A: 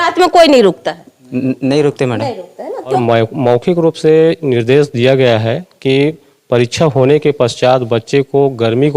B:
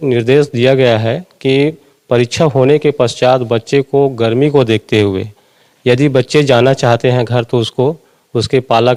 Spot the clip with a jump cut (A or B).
A